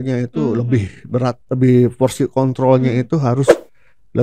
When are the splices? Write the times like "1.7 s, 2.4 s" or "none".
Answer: none

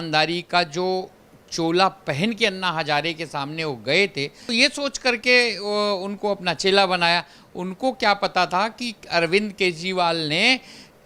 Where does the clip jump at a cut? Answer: 4.5 s

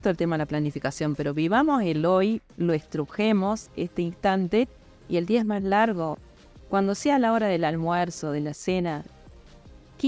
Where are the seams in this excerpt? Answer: 6.1 s

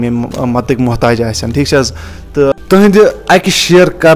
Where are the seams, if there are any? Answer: 2.5 s

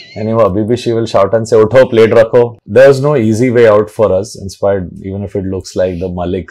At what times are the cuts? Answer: 2.6 s

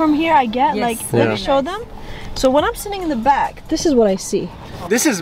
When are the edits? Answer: none

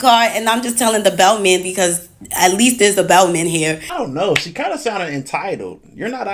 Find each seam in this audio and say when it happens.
3.9 s

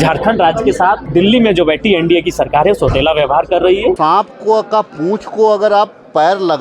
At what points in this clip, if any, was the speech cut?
1.0 s, 4.0 s

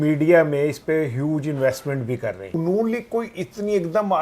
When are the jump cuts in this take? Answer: 2.5 s

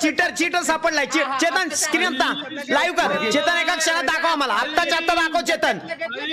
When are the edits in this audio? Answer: none

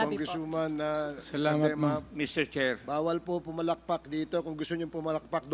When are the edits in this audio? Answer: none

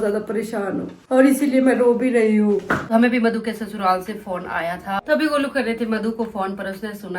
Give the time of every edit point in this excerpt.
2.8 s, 5.0 s

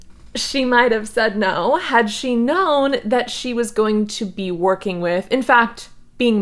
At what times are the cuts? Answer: none

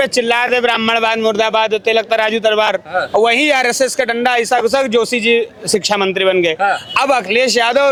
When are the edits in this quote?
none

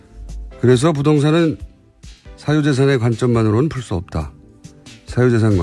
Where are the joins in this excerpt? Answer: 2.8 s

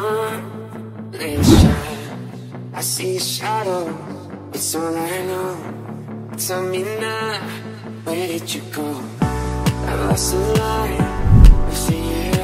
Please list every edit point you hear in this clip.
none

